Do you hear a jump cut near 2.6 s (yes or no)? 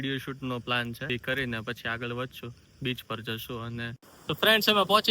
no